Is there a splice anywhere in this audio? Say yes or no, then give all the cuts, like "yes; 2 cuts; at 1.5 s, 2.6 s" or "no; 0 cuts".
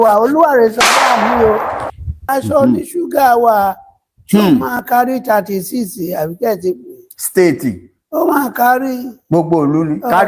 yes; 1 cut; at 2.2 s